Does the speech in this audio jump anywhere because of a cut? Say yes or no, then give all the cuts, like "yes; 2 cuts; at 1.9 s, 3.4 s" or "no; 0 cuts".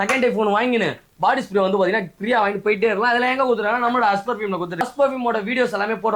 yes; 1 cut; at 4.8 s